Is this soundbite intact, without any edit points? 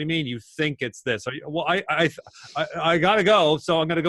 yes; 0 cuts

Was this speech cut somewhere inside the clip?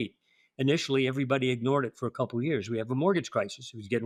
no; 0 cuts

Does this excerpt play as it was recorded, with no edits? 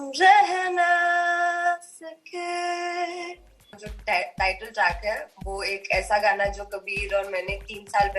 no; 1 cut; at 3.9 s

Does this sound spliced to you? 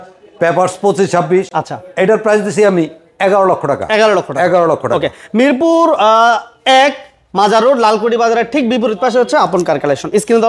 no; 0 cuts

